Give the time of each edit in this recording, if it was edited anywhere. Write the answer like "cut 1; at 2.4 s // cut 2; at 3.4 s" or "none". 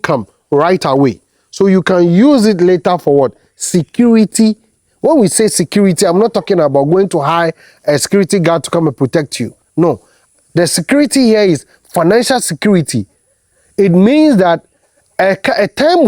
none